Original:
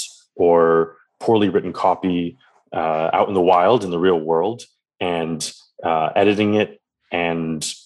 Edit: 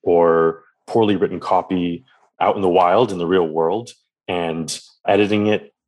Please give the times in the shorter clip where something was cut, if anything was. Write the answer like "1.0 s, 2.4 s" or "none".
2.4 s, 5.0 s